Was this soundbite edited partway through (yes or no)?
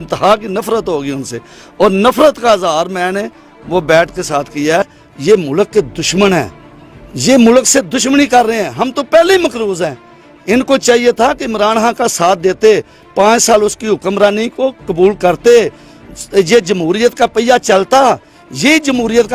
yes